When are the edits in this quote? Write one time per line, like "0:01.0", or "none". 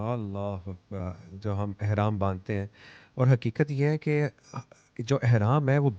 0:01.0